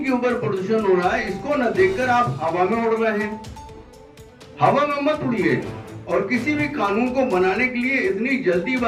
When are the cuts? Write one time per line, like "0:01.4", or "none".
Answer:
none